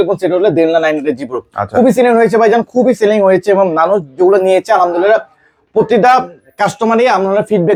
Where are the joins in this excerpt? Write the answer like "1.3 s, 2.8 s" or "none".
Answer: none